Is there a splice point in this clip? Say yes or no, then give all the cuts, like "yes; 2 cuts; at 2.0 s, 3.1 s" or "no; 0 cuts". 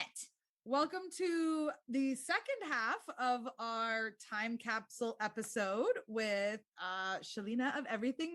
no; 0 cuts